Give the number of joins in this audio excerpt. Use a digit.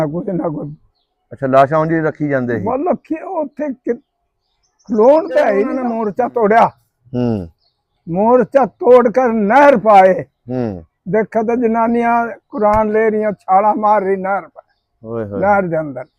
1